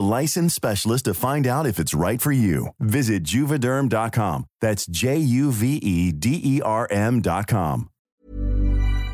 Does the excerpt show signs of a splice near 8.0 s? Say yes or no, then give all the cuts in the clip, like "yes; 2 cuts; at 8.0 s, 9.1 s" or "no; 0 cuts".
yes; 1 cut; at 8.0 s